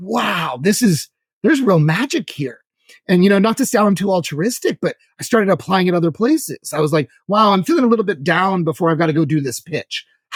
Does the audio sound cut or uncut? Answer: uncut